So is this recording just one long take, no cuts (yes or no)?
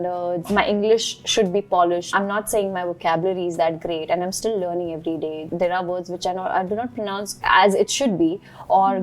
yes